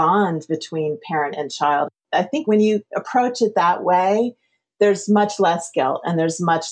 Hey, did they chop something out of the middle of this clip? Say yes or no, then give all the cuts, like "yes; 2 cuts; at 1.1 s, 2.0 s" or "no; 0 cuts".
yes; 1 cut; at 2.4 s